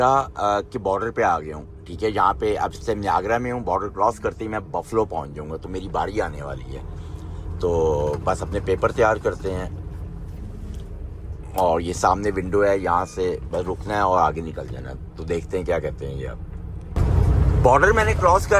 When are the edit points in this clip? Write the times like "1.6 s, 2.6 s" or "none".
none